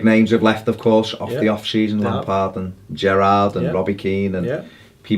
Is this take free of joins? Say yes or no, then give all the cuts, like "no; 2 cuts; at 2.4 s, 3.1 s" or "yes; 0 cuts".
no; 1 cut; at 4.1 s